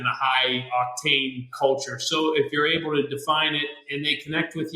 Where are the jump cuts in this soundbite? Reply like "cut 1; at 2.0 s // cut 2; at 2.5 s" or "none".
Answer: cut 1; at 1.5 s // cut 2; at 3.8 s